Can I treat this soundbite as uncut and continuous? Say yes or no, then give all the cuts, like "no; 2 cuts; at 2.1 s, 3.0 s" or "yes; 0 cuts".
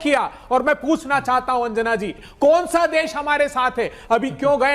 no; 1 cut; at 2.2 s